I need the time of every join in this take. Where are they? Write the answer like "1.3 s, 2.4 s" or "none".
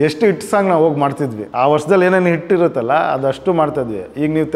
1.4 s